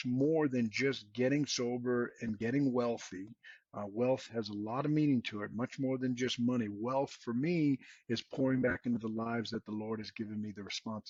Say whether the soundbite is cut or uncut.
uncut